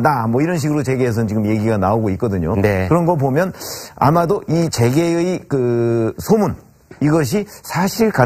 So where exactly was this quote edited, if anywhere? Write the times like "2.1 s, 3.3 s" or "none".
1.0 s